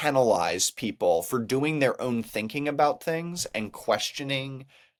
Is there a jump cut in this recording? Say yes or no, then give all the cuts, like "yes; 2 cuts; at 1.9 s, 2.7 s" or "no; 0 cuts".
no; 0 cuts